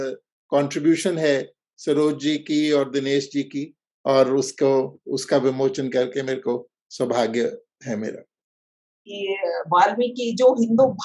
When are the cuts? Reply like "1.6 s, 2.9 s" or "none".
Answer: 9.1 s